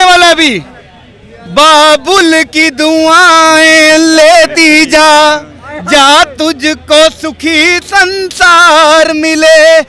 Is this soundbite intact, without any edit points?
yes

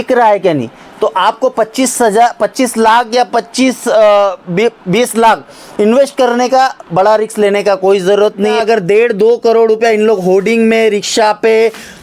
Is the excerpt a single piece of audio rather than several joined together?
no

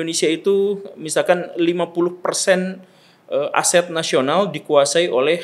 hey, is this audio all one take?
yes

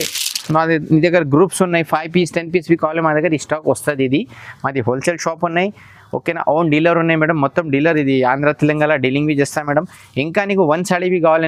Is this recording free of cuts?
yes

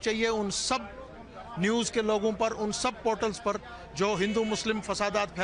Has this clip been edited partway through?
no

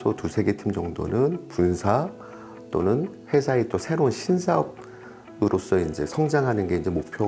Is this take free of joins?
yes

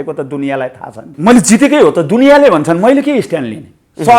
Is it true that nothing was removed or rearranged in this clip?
no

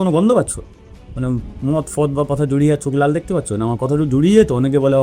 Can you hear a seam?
no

